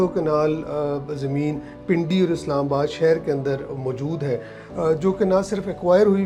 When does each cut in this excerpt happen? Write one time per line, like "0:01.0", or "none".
none